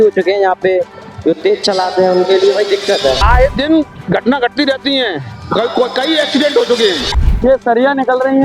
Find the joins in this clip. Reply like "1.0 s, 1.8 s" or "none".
3.2 s, 7.1 s